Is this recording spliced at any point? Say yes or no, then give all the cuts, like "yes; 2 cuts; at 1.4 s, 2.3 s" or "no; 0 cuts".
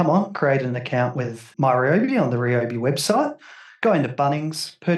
yes; 1 cut; at 1.4 s